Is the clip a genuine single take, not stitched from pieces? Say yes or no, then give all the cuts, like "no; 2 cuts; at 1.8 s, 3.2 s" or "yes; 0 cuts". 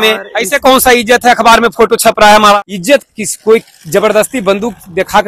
no; 1 cut; at 2.6 s